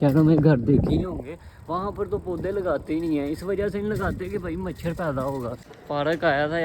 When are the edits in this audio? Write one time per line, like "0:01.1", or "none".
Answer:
0:05.6